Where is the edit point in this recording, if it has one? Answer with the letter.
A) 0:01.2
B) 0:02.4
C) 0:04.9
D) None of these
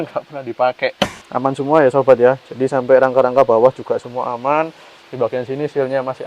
A